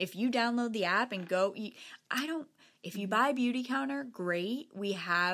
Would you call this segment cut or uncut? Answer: uncut